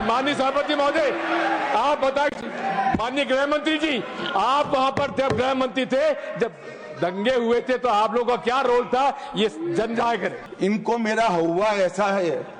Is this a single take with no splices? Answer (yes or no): no